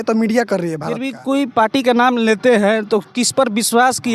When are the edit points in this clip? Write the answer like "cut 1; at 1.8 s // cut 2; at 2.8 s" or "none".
cut 1; at 1.1 s